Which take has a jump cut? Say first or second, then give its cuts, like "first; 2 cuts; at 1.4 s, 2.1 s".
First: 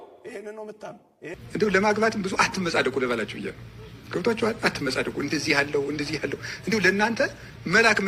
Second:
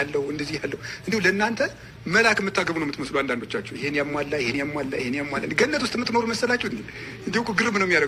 first; 1 cut; at 1.3 s